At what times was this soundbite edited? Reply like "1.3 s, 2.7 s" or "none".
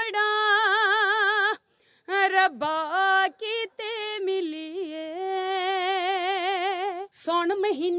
7.1 s